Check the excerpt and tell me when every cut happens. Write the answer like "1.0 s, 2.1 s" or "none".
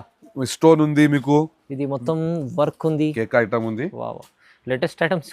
3.1 s